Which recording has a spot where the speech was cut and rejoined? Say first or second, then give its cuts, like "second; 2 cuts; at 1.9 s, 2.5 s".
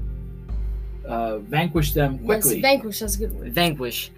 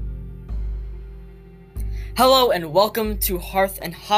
second; 1 cut; at 1.0 s